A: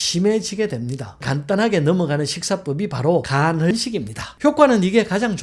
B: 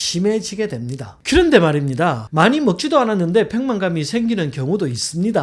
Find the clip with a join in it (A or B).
A